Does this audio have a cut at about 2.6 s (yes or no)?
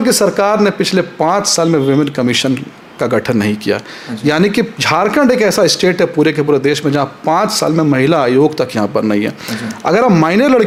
no